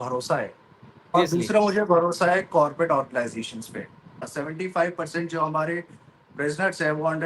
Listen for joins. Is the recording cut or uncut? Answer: cut